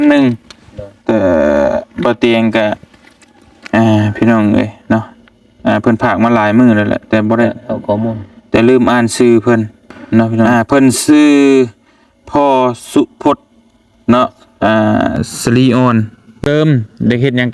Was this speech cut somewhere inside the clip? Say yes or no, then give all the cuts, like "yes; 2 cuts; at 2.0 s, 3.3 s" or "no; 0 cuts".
yes; 2 cuts; at 10.5 s, 16.4 s